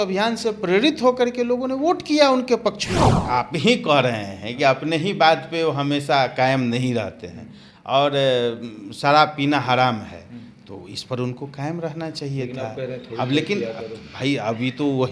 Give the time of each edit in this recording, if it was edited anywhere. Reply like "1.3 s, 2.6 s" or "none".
3.3 s

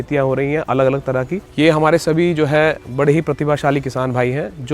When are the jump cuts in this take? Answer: 1.4 s

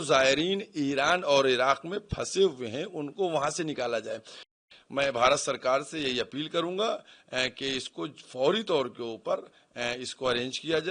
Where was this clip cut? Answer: 4.6 s

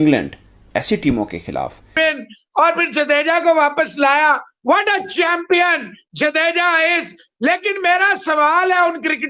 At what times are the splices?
1.9 s

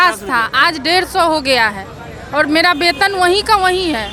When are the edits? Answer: none

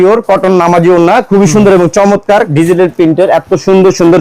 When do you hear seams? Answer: 2.5 s

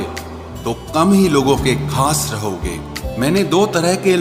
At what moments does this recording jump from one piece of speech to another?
3.0 s

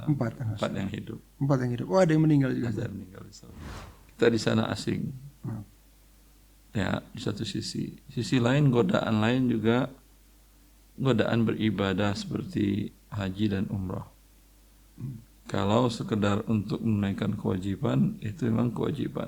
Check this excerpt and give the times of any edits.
3.7 s

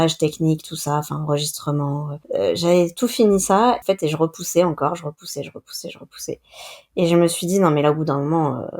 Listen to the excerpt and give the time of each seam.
2.2 s, 3.8 s

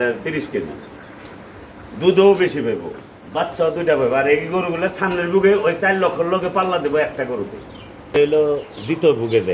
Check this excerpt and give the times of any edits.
8.2 s

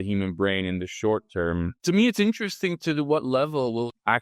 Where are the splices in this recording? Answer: 1.7 s

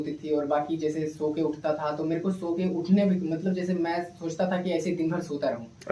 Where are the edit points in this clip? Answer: none

